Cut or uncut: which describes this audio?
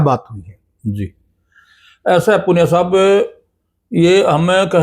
uncut